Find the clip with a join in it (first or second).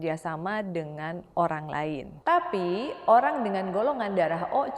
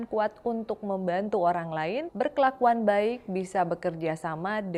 first